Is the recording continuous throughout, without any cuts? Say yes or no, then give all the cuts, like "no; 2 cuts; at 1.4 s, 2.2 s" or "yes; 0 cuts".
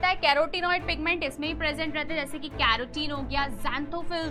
yes; 0 cuts